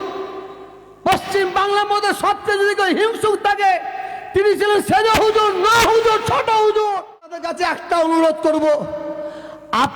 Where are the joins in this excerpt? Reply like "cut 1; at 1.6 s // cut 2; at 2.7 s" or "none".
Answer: cut 1; at 7.4 s

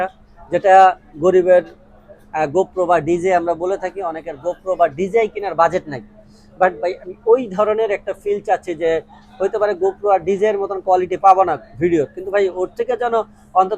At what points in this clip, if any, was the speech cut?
none

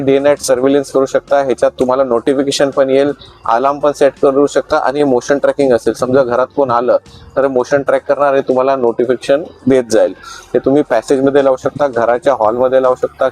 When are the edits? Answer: none

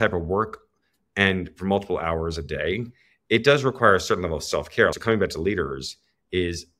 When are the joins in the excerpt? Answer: cut 1; at 5.0 s

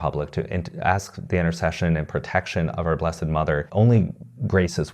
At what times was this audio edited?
cut 1; at 3.7 s

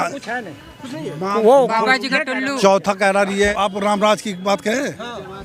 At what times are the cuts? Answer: cut 1; at 3.5 s

